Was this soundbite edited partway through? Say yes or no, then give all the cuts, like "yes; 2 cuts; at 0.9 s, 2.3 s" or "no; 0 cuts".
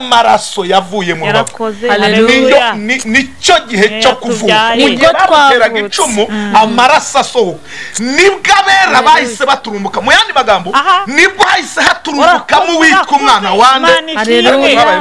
no; 0 cuts